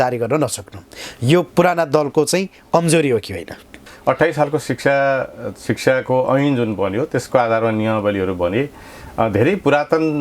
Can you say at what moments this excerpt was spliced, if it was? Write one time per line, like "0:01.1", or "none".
0:03.9